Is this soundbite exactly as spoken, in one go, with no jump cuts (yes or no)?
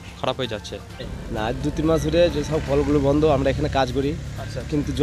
no